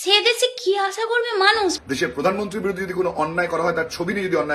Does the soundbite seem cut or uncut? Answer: cut